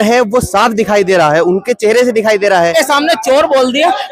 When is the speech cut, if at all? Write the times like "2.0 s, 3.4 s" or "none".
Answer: 2.7 s